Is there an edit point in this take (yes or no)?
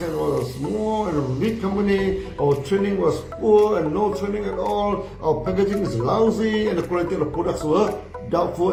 no